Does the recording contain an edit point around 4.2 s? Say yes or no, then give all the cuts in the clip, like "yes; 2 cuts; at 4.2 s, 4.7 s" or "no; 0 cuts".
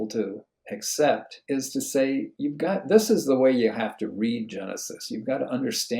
no; 2 cuts; at 1.3 s, 2.3 s